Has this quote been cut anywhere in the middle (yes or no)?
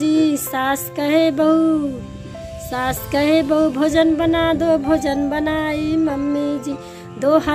no